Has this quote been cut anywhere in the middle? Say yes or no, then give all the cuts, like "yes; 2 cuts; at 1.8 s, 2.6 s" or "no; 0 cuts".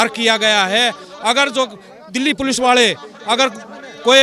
no; 0 cuts